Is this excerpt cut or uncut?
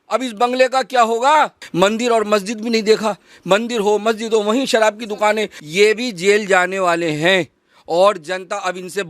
cut